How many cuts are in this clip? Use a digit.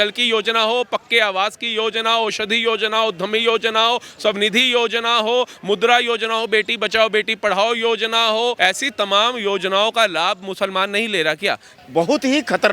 2